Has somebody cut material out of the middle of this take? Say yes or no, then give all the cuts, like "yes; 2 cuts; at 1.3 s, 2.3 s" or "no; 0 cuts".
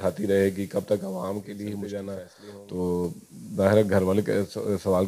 yes; 1 cut; at 1.6 s